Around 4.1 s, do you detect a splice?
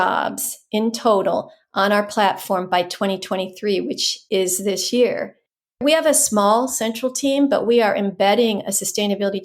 yes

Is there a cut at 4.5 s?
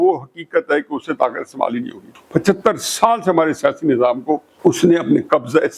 yes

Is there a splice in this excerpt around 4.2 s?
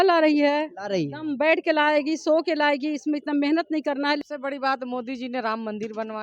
yes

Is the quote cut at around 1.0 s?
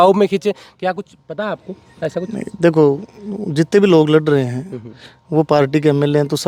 no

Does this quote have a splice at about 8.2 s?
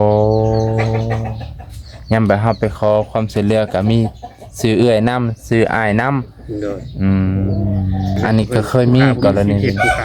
yes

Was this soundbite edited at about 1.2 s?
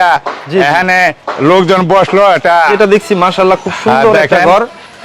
no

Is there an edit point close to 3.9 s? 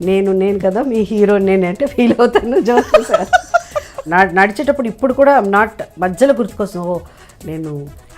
yes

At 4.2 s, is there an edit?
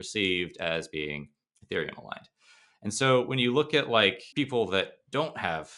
yes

